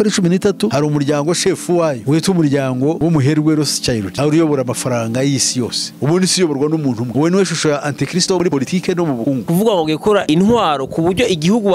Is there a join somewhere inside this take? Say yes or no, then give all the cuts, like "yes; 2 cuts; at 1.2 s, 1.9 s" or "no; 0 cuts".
yes; 2 cuts; at 5.9 s, 9.3 s